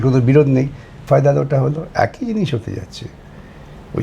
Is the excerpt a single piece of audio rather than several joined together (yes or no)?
no